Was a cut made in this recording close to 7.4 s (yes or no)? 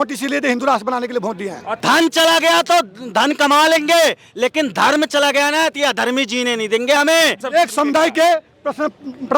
yes